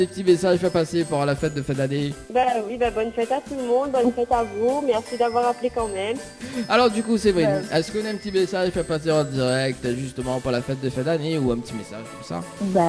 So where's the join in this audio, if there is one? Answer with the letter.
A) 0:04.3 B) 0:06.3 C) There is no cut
C